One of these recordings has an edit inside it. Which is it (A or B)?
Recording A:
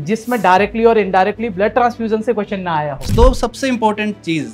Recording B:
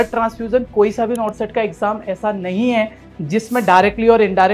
A